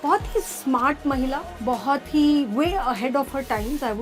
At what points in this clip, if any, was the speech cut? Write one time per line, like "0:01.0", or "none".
0:01.5